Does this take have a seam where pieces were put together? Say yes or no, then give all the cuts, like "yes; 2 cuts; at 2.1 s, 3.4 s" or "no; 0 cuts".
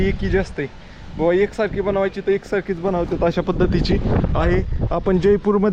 no; 0 cuts